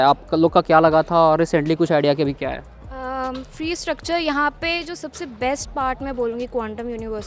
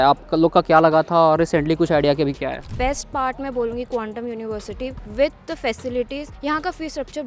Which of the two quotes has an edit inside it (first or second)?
second